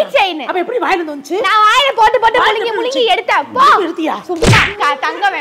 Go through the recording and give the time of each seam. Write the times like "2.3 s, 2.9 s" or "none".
none